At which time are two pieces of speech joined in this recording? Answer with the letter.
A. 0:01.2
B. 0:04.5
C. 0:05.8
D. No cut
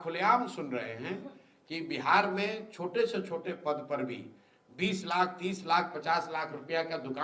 D